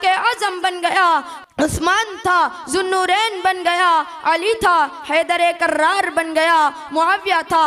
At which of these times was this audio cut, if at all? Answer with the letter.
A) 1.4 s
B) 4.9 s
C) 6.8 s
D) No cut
A